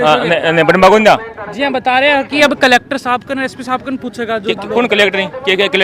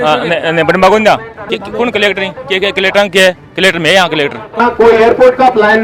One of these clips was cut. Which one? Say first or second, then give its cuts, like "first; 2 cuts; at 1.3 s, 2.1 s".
second; 2 cuts; at 1.4 s, 4.6 s